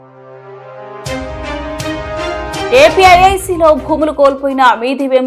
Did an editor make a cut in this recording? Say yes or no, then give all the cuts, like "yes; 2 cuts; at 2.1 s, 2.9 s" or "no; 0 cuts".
yes; 2 cuts; at 1.1 s, 2.7 s